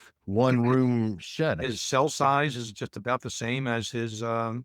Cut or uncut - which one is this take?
cut